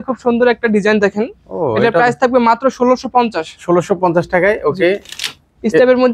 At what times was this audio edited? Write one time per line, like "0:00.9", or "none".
none